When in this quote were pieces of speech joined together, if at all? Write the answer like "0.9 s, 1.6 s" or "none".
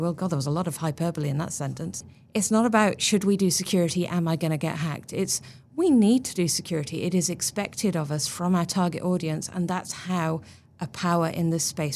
2.1 s